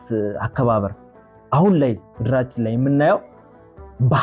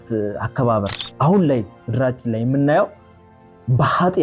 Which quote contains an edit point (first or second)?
second